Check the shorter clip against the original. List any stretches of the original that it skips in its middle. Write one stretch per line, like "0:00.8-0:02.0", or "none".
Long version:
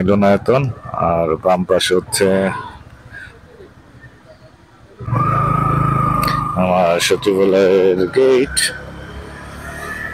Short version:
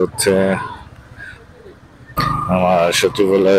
0:04.1-0:06.2